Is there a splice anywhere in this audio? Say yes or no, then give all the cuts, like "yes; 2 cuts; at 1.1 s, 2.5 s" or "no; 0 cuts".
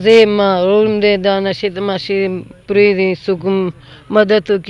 no; 0 cuts